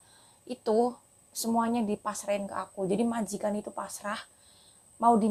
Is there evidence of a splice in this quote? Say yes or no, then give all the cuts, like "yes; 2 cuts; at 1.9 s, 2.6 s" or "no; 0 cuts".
no; 0 cuts